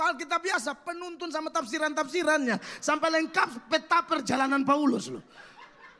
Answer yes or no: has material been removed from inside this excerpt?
no